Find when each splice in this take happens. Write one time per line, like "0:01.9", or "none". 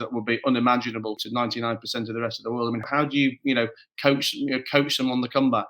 0:01.2
0:02.8